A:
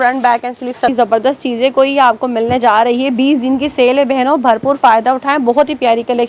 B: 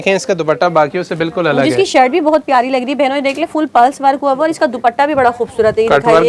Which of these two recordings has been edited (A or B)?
A